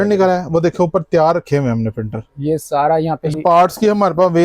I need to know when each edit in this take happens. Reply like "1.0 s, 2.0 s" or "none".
3.3 s